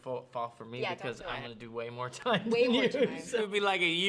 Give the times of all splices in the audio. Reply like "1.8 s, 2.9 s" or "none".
1.3 s